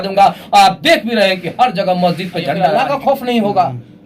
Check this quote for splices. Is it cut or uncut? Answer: cut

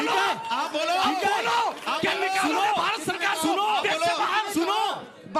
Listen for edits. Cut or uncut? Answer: uncut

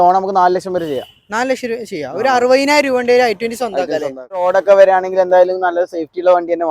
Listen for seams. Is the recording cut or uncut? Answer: cut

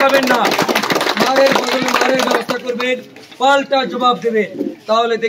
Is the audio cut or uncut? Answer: uncut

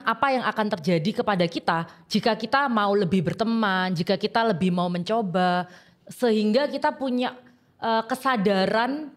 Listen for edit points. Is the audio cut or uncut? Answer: uncut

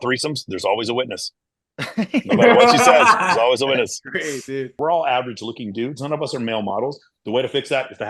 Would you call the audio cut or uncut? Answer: cut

